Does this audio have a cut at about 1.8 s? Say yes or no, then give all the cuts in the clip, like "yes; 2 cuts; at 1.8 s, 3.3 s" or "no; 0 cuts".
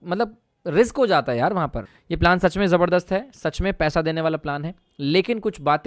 yes; 1 cut; at 1.8 s